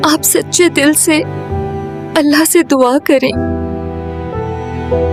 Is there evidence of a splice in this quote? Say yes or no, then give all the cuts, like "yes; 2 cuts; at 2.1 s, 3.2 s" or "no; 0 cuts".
no; 0 cuts